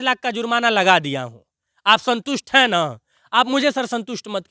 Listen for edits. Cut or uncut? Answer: uncut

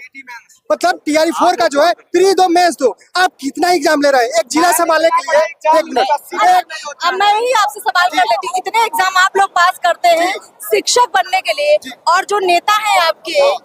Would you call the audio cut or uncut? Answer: uncut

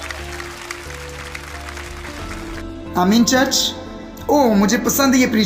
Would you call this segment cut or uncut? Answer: uncut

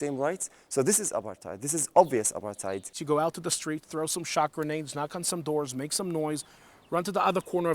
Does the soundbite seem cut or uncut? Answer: cut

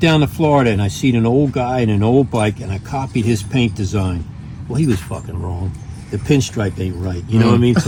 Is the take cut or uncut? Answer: uncut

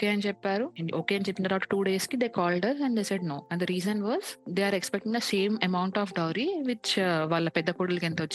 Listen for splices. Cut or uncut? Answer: uncut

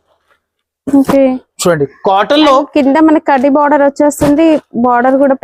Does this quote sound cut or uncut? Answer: uncut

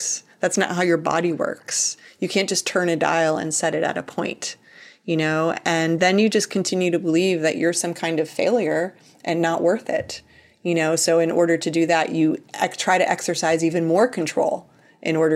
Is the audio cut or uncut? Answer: uncut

